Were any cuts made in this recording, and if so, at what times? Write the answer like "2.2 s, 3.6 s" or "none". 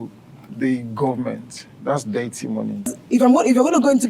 2.9 s